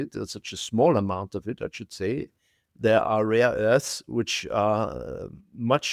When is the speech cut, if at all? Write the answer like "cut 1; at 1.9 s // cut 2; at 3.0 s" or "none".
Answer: cut 1; at 2.6 s